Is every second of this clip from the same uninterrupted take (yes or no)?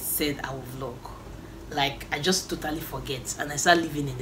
yes